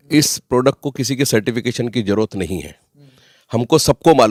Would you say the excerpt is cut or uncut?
uncut